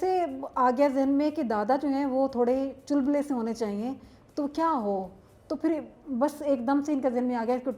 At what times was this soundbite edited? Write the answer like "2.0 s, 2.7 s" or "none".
none

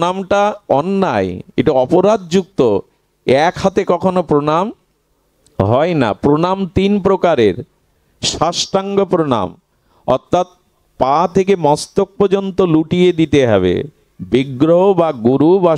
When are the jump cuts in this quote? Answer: none

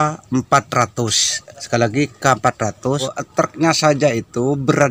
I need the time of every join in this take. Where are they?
3.1 s

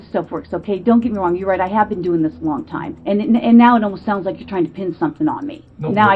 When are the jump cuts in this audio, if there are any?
2.9 s

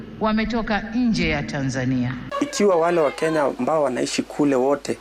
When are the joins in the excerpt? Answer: 2.3 s

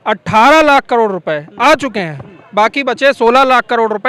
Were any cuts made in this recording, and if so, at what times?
none

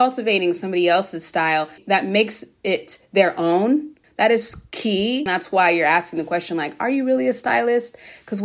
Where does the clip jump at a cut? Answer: 1.8 s, 4.0 s, 5.3 s

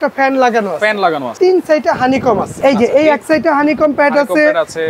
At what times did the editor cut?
1.3 s, 2.5 s

